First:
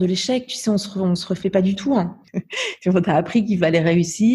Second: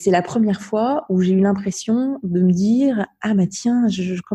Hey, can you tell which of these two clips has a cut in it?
first; 1 cut; at 2.2 s

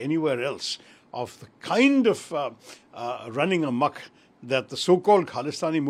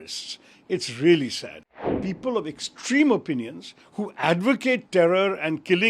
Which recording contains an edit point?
second; 1 cut; at 1.6 s

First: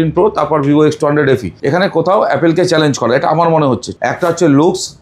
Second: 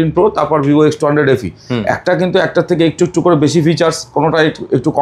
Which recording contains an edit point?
first; 2 cuts; at 1.5 s, 3.9 s

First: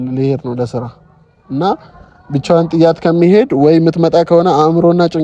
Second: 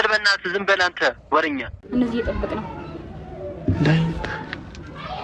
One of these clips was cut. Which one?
second; 1 cut; at 1.9 s

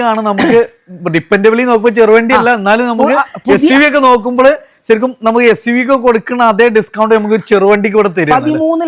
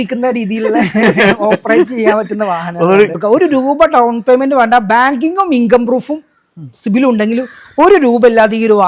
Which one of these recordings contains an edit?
second; 1 cut; at 3.1 s

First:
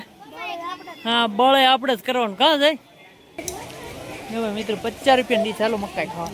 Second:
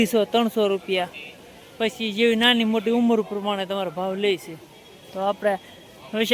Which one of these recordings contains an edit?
first; 1 cut; at 3.4 s

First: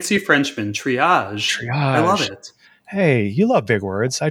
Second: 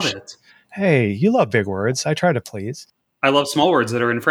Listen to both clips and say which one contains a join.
second; 1 cut; at 3.1 s

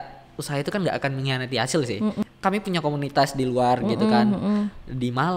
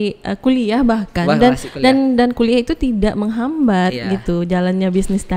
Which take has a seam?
first; 1 cut; at 2.2 s

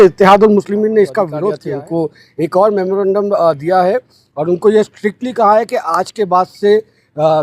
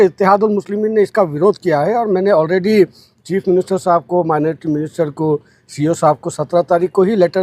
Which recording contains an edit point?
first; 1 cut; at 1.3 s

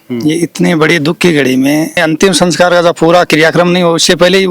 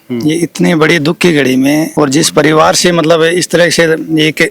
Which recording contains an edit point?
first; 1 cut; at 1.9 s

